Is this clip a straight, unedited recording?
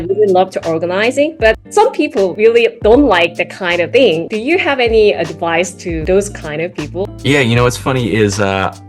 no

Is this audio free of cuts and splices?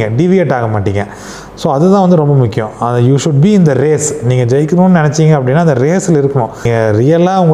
no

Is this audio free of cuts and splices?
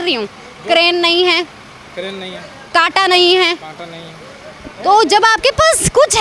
yes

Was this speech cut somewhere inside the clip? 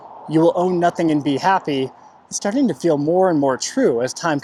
no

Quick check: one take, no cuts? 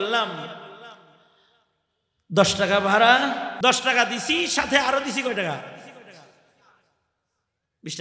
no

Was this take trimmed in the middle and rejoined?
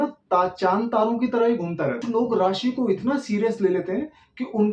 yes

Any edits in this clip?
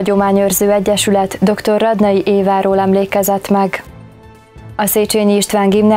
no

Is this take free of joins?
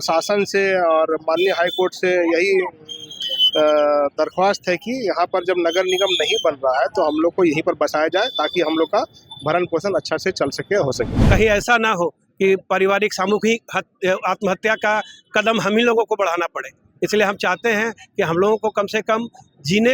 no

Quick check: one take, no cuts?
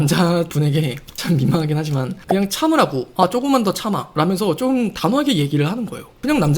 no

